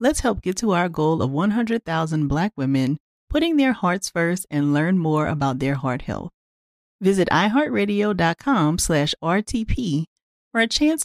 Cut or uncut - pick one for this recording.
uncut